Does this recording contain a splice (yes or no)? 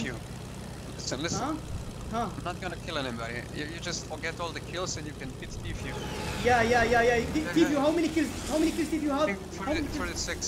no